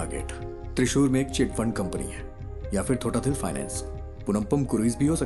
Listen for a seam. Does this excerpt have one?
no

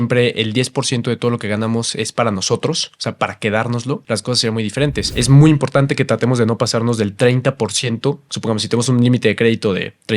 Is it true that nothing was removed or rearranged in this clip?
no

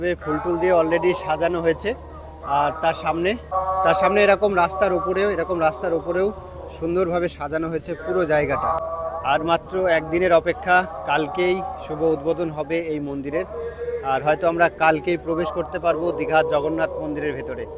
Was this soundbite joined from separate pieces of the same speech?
no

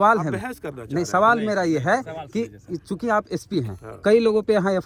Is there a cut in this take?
no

